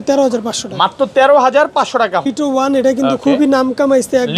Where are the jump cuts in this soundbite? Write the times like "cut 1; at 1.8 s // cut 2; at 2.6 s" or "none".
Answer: cut 1; at 2.2 s